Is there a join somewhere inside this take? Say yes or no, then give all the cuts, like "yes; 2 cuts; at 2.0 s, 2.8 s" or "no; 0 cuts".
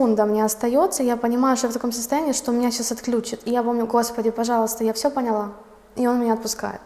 no; 0 cuts